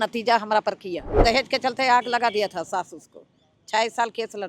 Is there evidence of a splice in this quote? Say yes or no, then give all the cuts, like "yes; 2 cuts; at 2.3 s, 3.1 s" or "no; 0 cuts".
yes; 1 cut; at 1.2 s